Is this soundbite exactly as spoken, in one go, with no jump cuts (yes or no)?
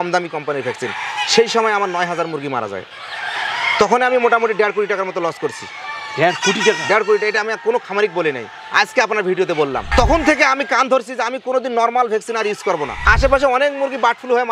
no